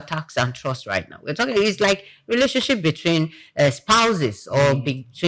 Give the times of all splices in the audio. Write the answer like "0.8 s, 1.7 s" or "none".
none